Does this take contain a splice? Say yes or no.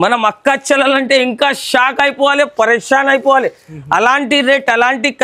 no